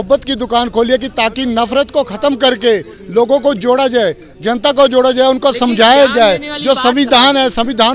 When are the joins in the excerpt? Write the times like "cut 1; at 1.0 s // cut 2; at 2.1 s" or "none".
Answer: none